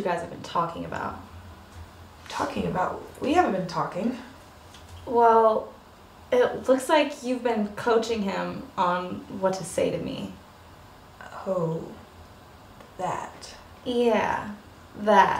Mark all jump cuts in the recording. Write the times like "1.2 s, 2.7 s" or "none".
12.6 s